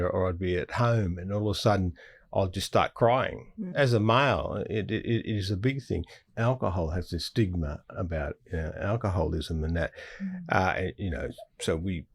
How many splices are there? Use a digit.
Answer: 2